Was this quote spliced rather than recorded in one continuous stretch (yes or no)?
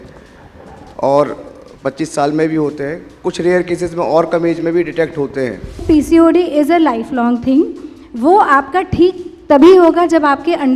yes